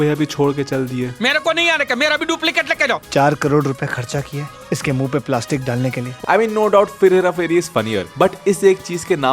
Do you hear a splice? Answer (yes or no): yes